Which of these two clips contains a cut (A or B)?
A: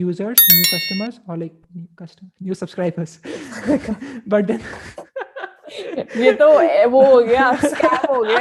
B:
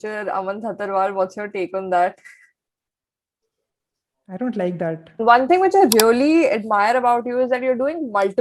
B